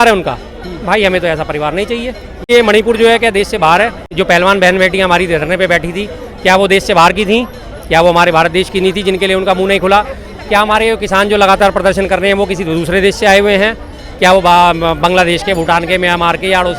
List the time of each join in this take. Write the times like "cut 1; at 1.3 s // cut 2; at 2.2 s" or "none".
cut 1; at 2.5 s // cut 2; at 4.1 s